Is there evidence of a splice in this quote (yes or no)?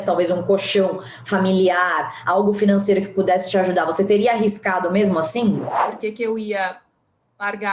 yes